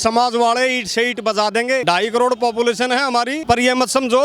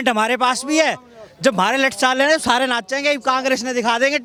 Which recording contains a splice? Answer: first; 2 cuts; at 1.8 s, 3.4 s

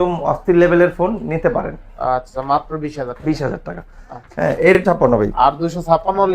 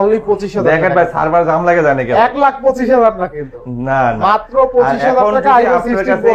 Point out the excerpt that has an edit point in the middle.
first; 1 cut; at 4.8 s

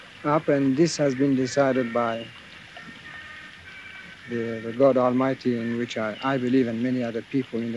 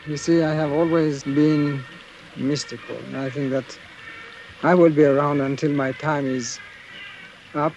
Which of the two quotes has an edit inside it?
second; 1 cut; at 1.2 s

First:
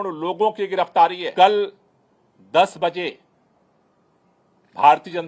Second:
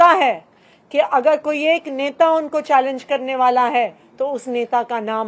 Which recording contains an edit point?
first; 1 cut; at 1.2 s

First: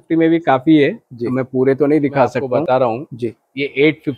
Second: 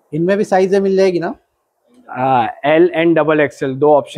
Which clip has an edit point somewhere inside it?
first; 1 cut; at 2.5 s

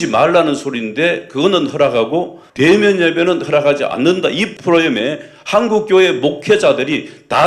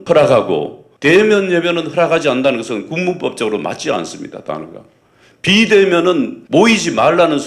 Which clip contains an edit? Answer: first; 1 cut; at 4.5 s

